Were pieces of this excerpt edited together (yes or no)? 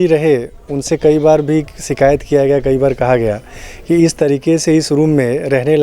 no